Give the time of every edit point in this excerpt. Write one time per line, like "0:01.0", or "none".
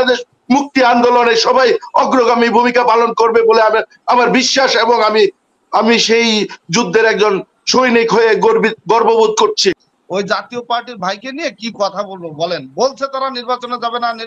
0:09.7